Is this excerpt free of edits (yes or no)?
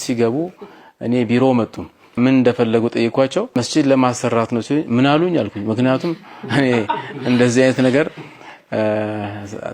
no